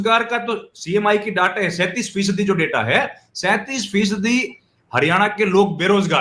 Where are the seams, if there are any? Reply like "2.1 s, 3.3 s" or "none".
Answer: none